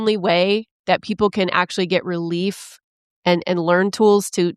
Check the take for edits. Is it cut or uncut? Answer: uncut